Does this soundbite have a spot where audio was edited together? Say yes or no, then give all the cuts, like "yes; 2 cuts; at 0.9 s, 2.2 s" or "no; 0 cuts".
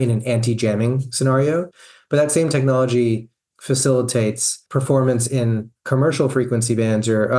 yes; 1 cut; at 1.8 s